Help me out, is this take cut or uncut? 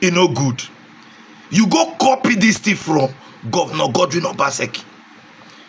uncut